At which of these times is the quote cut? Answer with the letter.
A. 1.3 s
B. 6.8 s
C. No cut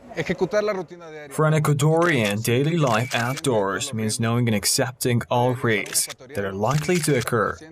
B